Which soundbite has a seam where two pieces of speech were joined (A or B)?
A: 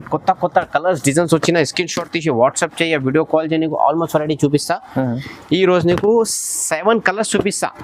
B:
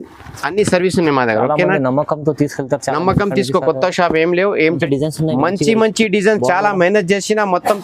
B